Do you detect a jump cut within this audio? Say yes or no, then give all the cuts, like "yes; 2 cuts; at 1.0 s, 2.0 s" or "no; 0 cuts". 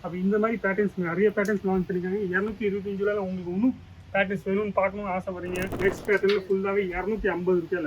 yes; 1 cut; at 5.7 s